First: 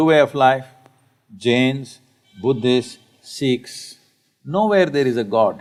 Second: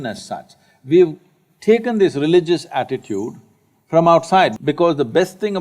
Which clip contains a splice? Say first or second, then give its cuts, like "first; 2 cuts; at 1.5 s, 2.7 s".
second; 1 cut; at 4.6 s